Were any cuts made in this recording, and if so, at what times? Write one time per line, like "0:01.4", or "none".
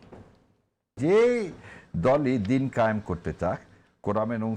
0:00.9